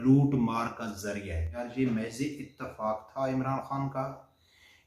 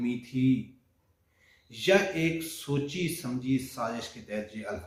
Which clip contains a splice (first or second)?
first